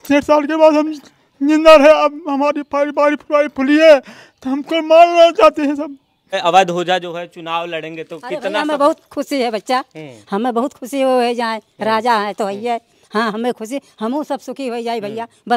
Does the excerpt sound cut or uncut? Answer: cut